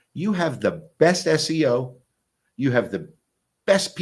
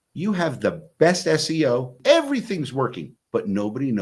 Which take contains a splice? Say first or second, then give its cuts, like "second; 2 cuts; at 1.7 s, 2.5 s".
second; 2 cuts; at 1.9 s, 3.1 s